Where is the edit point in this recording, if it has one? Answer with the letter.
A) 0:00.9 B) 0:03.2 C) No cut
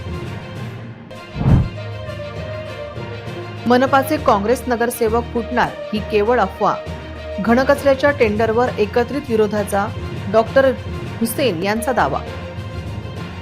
A